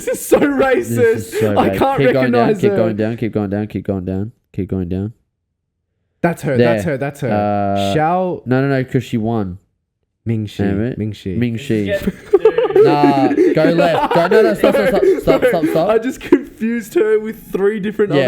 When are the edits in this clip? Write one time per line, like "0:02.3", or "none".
none

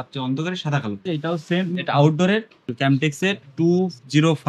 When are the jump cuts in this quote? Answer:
0:01.0
0:02.6

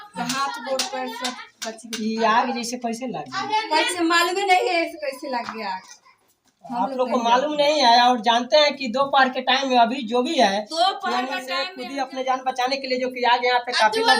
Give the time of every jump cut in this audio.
0:11.6

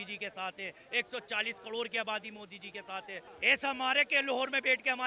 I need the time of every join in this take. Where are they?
0:03.3

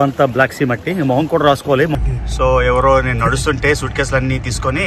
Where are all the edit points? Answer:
0:01.9

